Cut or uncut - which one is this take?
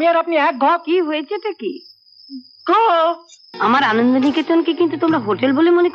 cut